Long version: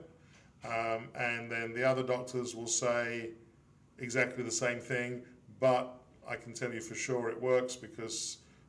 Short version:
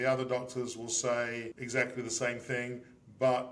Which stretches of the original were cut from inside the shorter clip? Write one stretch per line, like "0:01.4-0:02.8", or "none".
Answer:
0:03.3-0:04.0